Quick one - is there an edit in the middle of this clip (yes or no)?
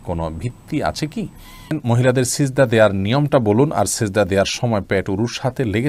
yes